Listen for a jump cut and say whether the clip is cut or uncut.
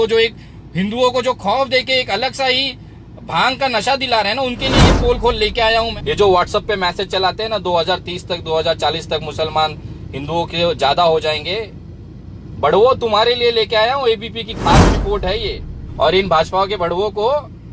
cut